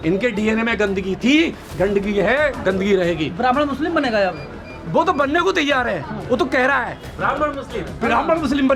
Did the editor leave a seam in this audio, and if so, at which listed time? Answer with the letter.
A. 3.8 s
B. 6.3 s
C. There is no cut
C